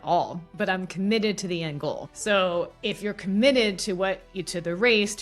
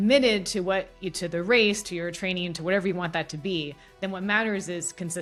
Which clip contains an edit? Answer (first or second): first